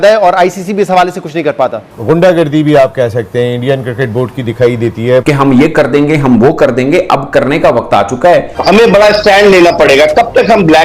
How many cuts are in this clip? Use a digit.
3